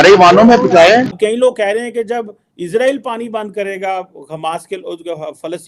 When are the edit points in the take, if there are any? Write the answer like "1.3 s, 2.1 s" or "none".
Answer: 1.2 s